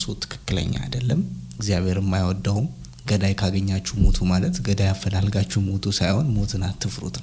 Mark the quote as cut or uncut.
uncut